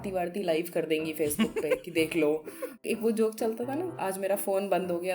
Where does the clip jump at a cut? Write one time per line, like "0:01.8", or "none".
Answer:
0:02.8
0:04.0

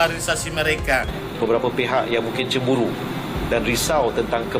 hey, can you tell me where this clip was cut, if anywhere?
0:01.2

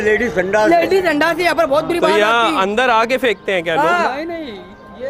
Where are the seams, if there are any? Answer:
none

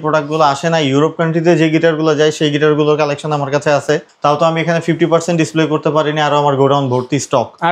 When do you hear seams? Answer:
none

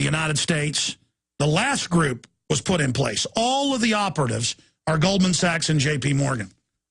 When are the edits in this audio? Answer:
none

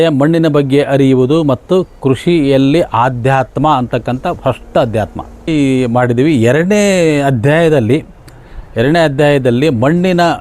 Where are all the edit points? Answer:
0:05.5

